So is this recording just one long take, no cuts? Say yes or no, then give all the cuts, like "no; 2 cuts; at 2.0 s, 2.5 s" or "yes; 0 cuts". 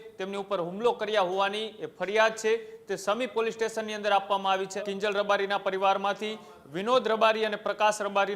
no; 1 cut; at 4.8 s